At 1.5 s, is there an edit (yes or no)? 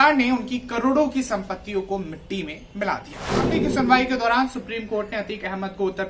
no